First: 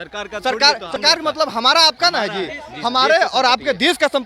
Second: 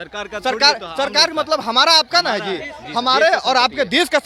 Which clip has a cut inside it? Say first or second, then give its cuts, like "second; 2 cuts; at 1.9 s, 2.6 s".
first; 1 cut; at 1.0 s